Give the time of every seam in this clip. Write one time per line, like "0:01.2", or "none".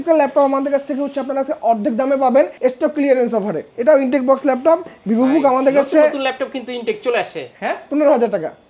0:02.5
0:03.7
0:07.5